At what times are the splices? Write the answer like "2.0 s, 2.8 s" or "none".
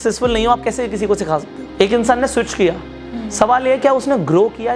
1.6 s, 2.9 s